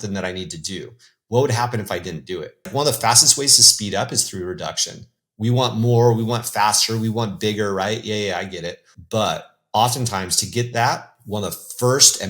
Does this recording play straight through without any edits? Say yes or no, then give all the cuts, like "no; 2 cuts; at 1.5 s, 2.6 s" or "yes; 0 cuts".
no; 1 cut; at 2.6 s